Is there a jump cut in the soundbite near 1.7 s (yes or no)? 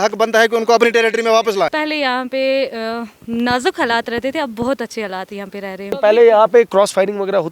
yes